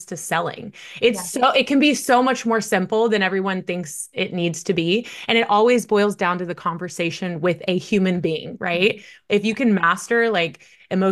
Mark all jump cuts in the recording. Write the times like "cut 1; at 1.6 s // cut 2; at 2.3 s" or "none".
none